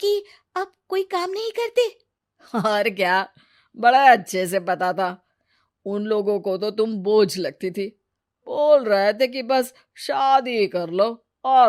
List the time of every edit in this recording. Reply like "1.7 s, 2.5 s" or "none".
none